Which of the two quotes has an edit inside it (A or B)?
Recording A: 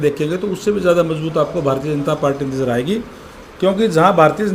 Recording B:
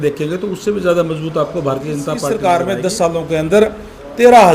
B